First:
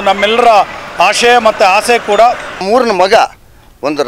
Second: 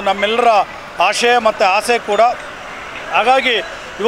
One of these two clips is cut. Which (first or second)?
first